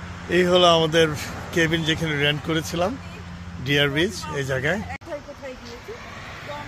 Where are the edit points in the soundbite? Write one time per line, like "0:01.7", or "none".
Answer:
0:04.9